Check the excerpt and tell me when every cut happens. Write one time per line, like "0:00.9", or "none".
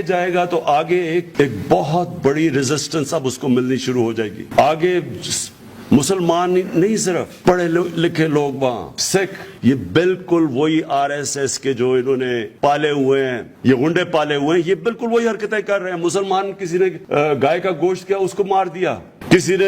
0:09.5
0:12.5
0:13.5
0:17.0